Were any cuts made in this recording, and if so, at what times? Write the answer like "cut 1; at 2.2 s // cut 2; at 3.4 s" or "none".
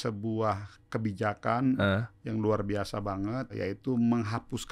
cut 1; at 3.5 s